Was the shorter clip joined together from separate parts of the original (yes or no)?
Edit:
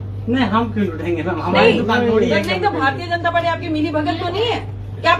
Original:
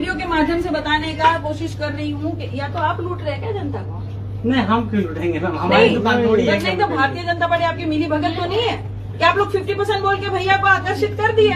no